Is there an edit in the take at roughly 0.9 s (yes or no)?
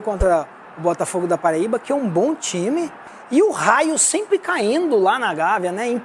no